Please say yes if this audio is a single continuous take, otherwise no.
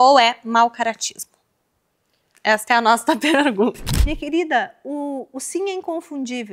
no